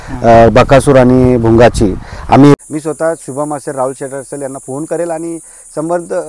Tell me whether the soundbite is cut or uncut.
cut